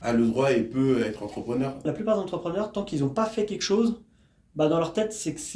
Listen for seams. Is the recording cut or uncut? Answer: cut